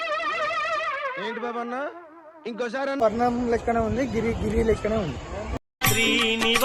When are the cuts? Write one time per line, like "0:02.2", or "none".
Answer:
0:05.6